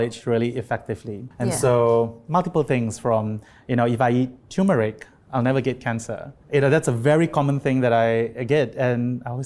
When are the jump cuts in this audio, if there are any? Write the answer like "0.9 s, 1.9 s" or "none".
1.3 s, 6.3 s